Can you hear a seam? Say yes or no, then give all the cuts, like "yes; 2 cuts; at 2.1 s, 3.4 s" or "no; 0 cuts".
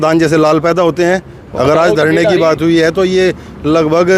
yes; 1 cut; at 1.4 s